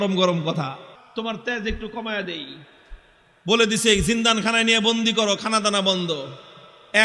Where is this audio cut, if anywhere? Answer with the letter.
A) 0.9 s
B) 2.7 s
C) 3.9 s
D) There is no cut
A